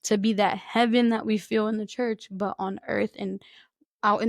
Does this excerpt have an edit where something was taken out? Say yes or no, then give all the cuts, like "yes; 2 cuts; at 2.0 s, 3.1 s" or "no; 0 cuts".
no; 0 cuts